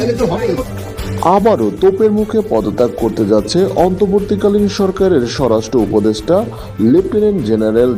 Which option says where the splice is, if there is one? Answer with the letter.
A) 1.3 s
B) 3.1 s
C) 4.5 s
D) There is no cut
D